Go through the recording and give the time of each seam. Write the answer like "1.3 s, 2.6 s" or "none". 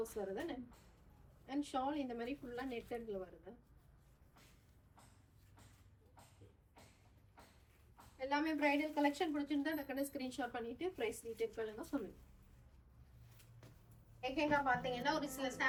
none